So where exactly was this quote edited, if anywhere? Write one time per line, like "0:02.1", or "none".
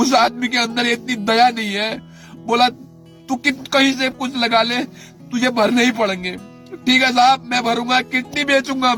none